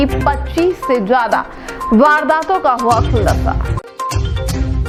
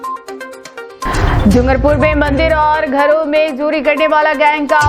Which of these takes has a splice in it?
second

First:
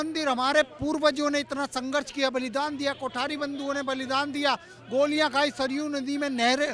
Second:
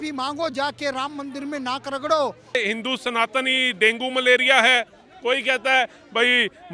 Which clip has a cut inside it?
second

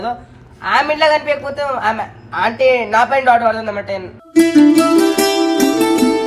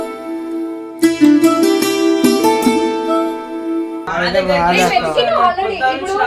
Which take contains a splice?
second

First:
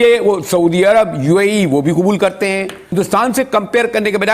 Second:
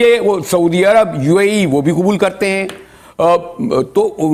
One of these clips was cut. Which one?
first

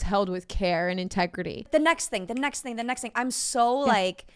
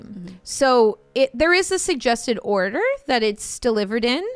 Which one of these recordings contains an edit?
first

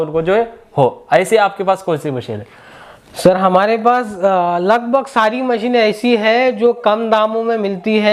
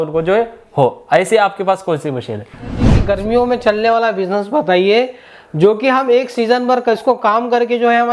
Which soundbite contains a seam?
second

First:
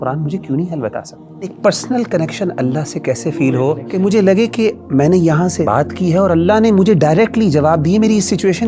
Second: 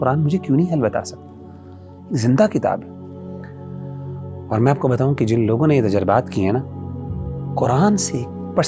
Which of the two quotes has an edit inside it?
first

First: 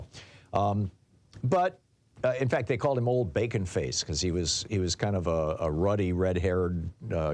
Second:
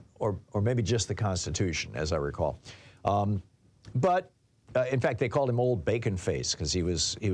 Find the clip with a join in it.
first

